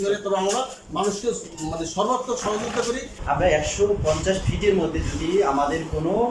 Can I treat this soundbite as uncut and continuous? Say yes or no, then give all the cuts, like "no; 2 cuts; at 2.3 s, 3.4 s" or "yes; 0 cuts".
no; 1 cut; at 3.2 s